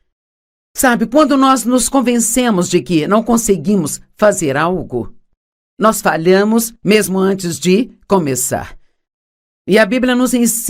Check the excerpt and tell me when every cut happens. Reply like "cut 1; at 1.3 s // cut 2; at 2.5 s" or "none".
cut 1; at 3.6 s

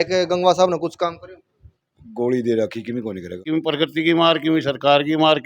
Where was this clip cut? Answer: cut 1; at 3.4 s

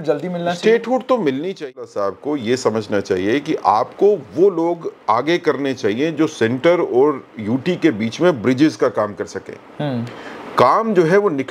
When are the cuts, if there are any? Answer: cut 1; at 1.6 s

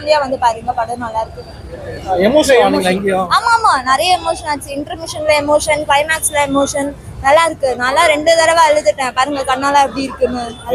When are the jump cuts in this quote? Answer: none

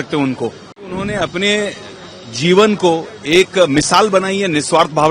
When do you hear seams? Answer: cut 1; at 1.0 s

